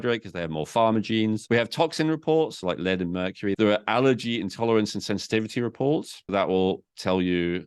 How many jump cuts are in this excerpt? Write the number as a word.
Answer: three